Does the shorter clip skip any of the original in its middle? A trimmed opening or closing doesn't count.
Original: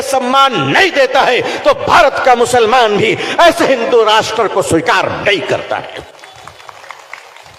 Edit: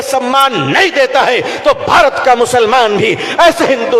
no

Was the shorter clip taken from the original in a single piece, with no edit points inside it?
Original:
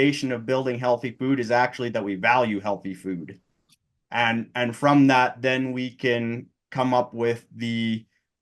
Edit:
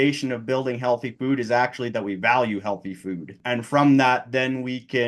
no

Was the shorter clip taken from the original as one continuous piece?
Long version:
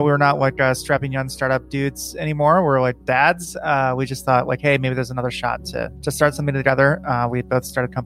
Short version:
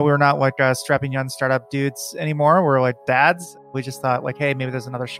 no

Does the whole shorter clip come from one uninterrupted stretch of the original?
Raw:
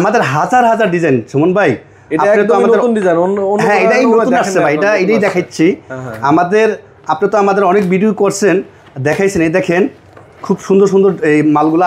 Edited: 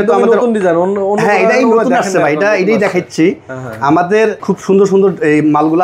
no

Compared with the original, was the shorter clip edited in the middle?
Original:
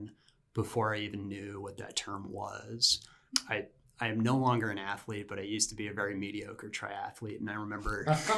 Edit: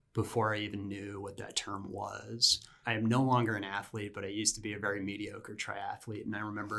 yes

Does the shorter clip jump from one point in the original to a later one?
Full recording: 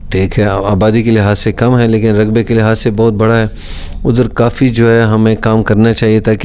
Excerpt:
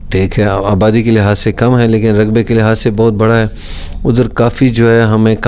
no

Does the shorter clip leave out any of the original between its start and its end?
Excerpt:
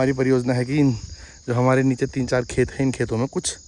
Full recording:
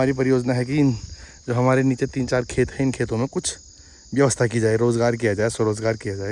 no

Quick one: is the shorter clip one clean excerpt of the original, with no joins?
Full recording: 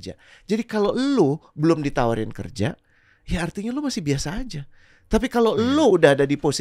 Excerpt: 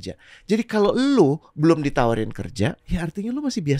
no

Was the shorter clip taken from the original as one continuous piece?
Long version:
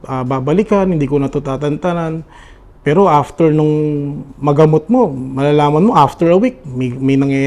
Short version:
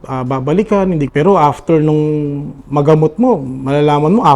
no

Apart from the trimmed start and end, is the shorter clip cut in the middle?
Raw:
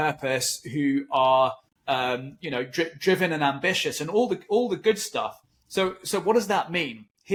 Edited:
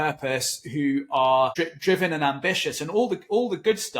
yes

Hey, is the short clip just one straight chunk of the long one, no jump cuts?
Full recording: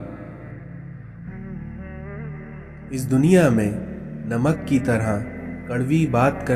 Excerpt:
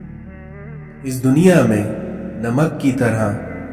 no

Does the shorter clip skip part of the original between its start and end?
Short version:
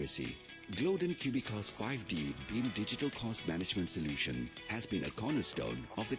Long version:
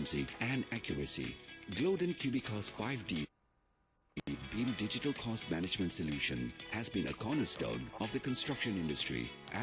yes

